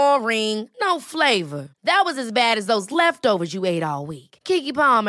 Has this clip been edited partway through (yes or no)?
no